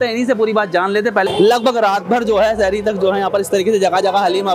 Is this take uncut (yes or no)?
no